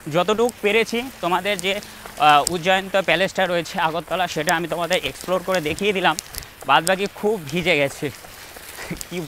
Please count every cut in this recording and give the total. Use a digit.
0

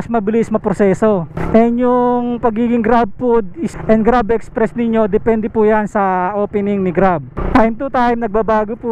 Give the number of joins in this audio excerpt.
0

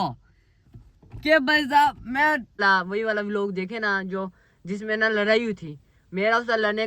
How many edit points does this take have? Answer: 1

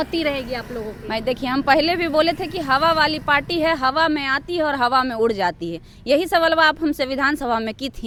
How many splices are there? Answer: 0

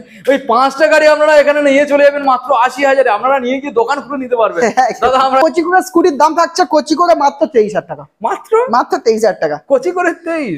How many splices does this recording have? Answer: 1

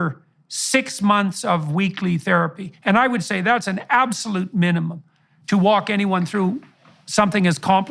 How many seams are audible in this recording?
0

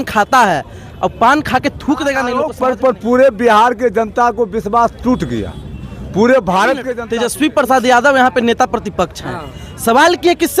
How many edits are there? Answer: 2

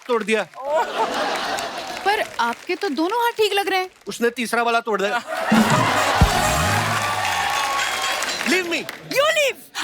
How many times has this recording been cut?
1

